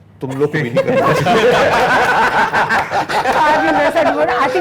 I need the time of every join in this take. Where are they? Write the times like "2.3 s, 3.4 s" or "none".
none